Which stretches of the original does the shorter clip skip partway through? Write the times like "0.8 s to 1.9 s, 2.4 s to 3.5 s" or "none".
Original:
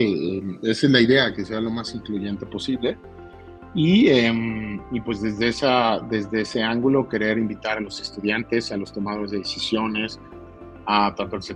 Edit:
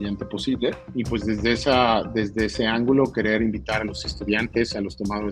3.1 s to 4.9 s